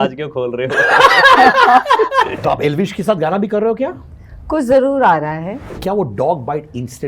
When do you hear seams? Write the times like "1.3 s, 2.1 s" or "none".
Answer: 2.4 s, 5.7 s